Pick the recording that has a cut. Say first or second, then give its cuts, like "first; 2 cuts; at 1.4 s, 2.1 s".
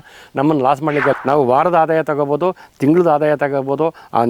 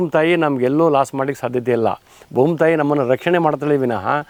first; 1 cut; at 1.1 s